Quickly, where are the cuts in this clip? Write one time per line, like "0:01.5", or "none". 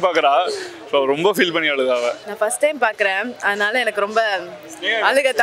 0:02.2